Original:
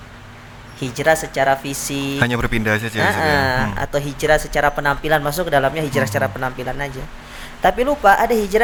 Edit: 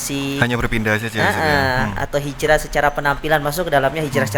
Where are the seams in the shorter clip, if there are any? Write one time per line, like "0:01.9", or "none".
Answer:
none